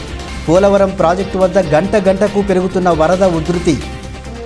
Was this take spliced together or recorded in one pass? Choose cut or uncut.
uncut